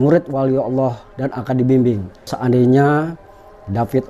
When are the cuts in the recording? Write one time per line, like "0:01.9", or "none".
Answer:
0:02.3